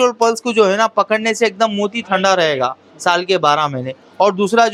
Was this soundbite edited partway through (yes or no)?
no